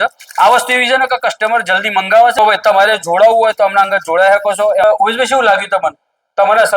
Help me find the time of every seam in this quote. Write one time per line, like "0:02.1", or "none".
0:02.4
0:04.8